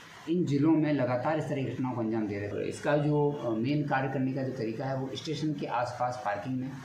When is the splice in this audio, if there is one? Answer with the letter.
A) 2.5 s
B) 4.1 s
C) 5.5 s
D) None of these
A